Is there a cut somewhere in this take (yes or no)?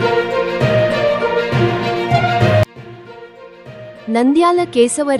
yes